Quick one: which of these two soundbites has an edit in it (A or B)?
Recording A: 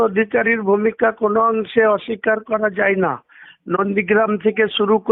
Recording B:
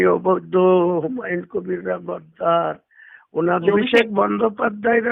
B